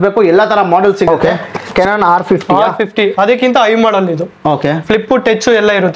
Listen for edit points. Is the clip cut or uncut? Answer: cut